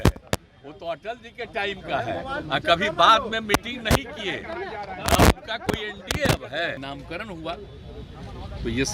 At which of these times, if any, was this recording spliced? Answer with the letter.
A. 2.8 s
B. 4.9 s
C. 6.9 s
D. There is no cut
C